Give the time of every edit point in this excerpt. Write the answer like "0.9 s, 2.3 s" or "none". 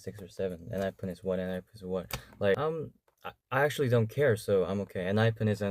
2.6 s

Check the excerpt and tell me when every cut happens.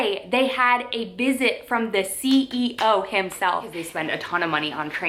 3.8 s

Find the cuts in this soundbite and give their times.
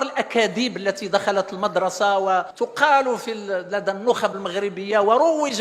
2.5 s

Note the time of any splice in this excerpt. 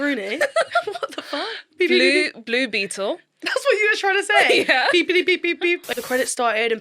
5.9 s

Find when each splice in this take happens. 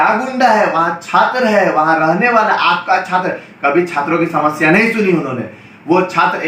none

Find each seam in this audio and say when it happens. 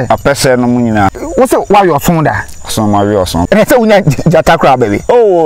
1.1 s, 3.5 s

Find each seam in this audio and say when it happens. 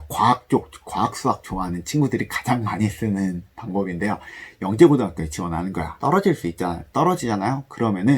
5.9 s

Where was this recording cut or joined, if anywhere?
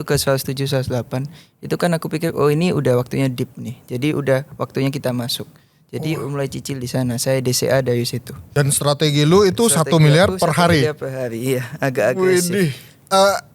8.4 s

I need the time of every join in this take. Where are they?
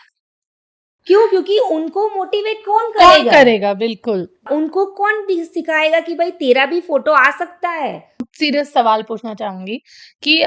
4.4 s, 8.2 s

